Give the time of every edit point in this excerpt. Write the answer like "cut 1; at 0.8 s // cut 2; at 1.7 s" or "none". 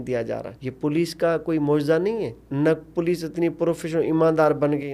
cut 1; at 2.4 s